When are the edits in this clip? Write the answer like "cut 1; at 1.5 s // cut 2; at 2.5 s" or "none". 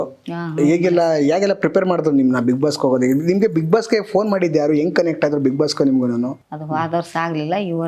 cut 1; at 6.5 s